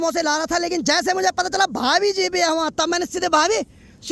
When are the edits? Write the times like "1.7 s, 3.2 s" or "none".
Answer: none